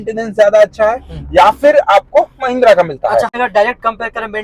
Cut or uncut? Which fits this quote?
cut